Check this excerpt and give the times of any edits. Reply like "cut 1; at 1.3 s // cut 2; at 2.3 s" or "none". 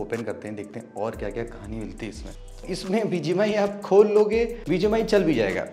cut 1; at 2.7 s // cut 2; at 4.6 s